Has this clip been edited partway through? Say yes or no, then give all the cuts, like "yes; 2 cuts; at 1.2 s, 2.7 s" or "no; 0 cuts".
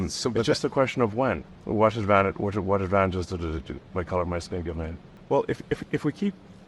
yes; 2 cuts; at 1.5 s, 5.1 s